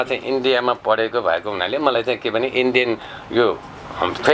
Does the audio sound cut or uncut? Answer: uncut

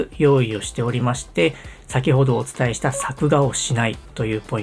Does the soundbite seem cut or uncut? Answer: uncut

